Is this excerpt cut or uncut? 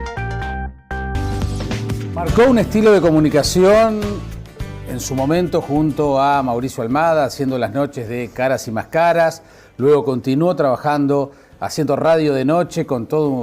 cut